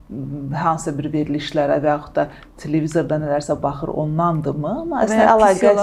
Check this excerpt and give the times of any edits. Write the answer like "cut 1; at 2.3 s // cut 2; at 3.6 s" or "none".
none

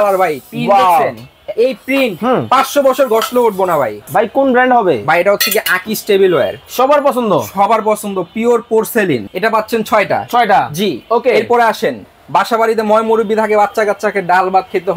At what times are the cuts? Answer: cut 1; at 4.1 s // cut 2; at 9.2 s

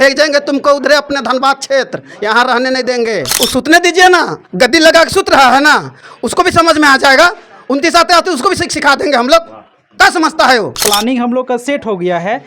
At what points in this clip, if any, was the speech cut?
cut 1; at 3.3 s // cut 2; at 10.8 s

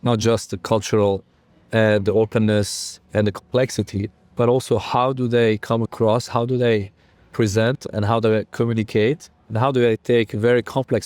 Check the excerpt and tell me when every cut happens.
none

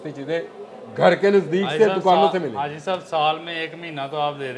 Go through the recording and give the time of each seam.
none

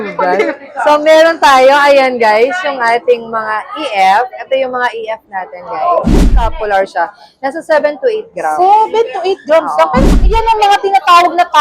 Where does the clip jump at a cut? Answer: cut 1; at 6.5 s // cut 2; at 10.0 s

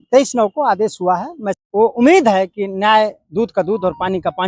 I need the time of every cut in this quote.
cut 1; at 1.6 s

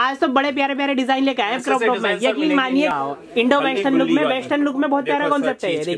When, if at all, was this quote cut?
cut 1; at 2.9 s

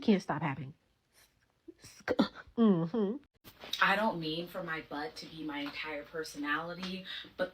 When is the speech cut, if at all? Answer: cut 1; at 3.3 s

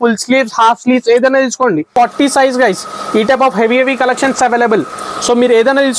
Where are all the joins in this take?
cut 1; at 1.9 s

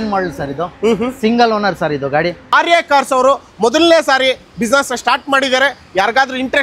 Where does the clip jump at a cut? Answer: cut 1; at 2.5 s

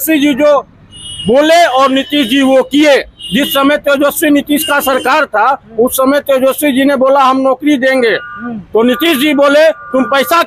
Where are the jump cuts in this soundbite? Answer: none

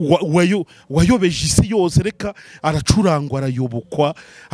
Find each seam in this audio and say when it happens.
none

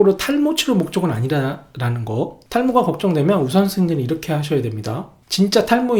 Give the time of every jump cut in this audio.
none

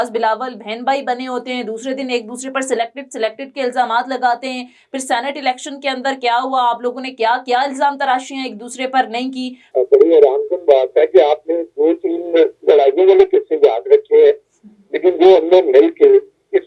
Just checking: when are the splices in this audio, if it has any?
cut 1; at 9.6 s

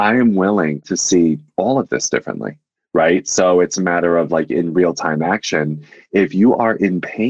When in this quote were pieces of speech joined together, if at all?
cut 1; at 0.8 s // cut 2; at 2.9 s

